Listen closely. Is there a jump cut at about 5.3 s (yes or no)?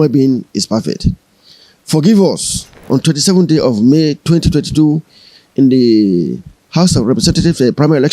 no